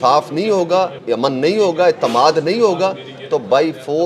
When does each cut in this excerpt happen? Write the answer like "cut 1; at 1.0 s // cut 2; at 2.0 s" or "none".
cut 1; at 1.0 s